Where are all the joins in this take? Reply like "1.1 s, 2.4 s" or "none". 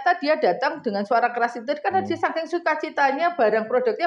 none